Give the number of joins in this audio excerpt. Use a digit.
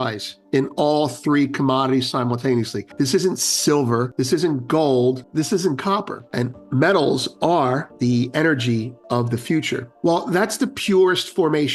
6